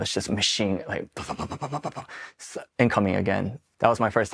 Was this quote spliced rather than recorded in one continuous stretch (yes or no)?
no